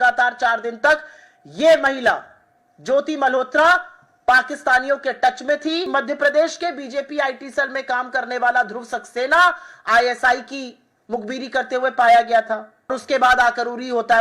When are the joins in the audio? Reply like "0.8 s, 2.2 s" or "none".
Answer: 5.9 s, 12.9 s